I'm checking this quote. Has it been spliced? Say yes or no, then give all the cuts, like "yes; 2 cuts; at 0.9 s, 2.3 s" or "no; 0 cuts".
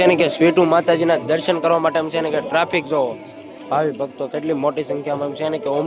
no; 0 cuts